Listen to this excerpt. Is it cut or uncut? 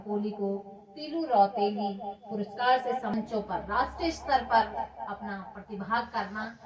cut